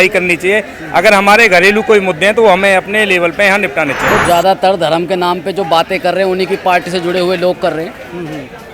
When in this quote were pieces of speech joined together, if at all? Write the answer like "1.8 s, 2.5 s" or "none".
4.1 s